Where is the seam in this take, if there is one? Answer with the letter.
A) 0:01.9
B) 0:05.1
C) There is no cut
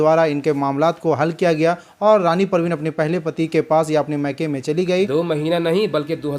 B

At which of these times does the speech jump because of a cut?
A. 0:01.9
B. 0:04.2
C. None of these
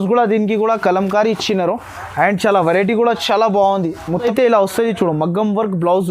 B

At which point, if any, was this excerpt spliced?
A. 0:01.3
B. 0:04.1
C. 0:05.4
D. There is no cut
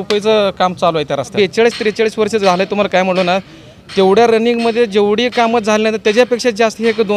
A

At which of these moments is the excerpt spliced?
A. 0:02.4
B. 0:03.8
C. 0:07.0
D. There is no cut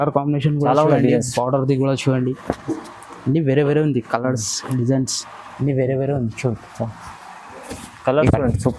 C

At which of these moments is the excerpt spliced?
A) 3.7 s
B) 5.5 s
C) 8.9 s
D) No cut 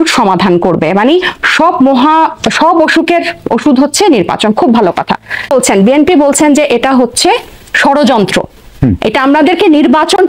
B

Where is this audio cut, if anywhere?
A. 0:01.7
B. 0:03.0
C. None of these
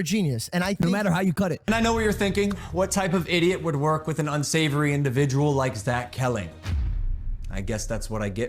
A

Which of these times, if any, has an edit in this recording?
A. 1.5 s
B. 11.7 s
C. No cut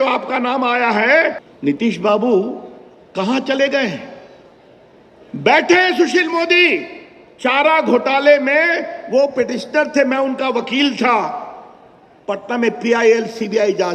A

